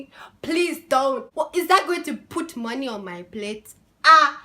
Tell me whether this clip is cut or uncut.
cut